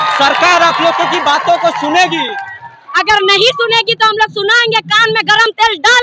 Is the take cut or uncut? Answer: uncut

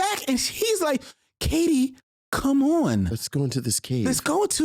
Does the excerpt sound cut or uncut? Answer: uncut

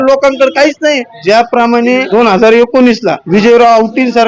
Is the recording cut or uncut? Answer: cut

